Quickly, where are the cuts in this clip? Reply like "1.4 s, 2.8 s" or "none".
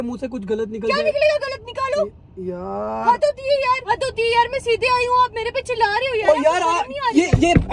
3.8 s